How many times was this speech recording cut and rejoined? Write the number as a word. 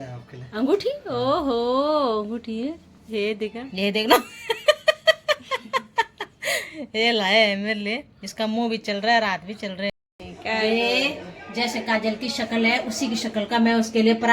two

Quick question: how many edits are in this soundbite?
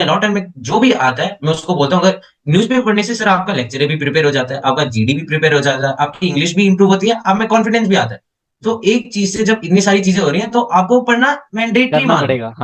zero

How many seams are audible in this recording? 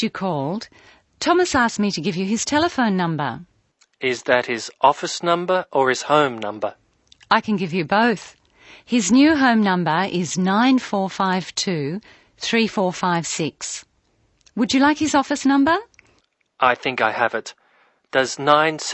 zero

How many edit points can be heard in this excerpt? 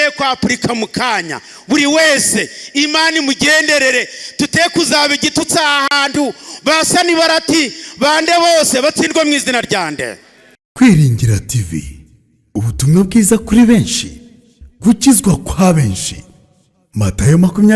one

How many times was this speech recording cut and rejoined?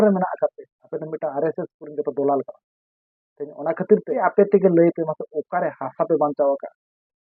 one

